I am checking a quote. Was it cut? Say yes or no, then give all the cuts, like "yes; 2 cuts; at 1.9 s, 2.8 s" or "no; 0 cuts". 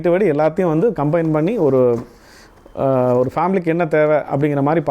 no; 0 cuts